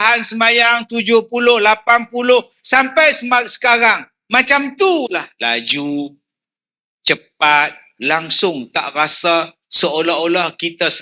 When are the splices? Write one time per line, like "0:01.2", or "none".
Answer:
0:05.3
0:07.9